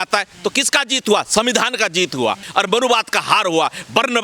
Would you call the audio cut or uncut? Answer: cut